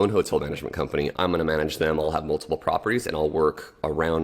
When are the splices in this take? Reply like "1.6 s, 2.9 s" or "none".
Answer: 1.1 s